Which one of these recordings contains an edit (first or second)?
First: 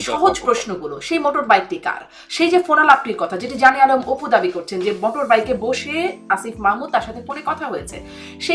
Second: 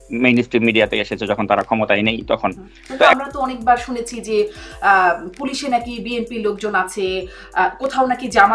second